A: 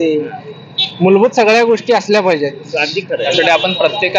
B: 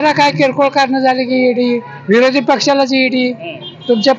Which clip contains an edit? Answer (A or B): A